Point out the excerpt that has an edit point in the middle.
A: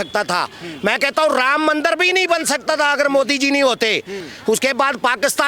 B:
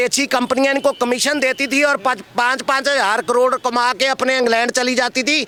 A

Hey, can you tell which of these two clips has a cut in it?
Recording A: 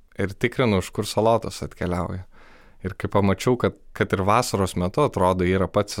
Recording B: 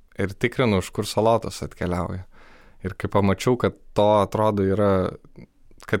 A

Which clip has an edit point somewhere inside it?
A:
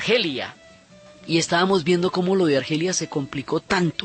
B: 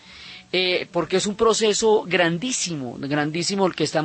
B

